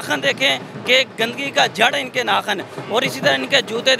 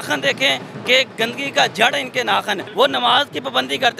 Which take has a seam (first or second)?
second